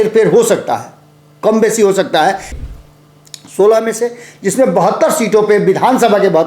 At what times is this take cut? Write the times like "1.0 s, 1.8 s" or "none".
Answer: 2.5 s